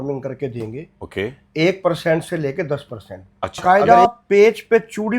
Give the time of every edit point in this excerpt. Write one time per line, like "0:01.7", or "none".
0:03.6